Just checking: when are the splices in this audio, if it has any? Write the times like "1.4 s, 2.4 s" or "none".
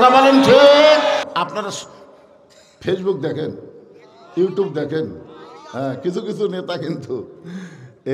1.3 s